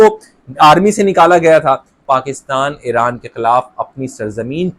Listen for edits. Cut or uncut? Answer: cut